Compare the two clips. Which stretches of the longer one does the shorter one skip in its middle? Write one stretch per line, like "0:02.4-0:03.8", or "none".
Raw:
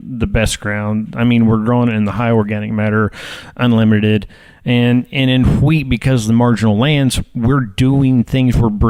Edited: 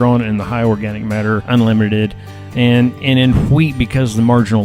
0:03.1-0:03.5